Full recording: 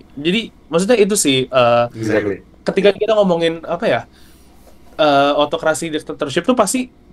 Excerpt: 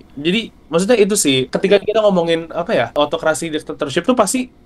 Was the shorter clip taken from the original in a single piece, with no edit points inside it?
no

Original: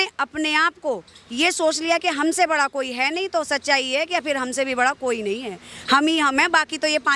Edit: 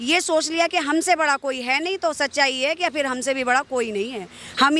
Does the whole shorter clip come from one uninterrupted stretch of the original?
yes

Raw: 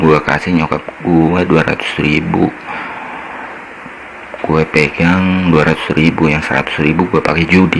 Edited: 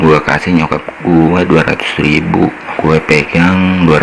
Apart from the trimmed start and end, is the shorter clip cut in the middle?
yes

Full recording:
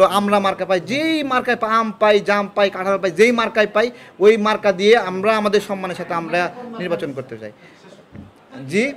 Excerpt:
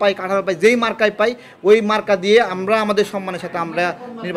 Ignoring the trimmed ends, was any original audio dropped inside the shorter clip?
no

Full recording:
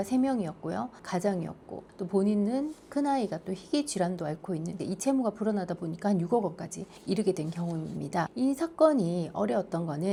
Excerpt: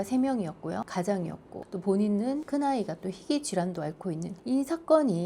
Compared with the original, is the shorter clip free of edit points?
no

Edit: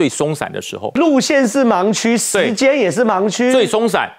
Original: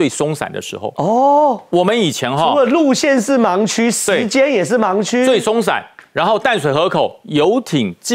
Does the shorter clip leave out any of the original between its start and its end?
yes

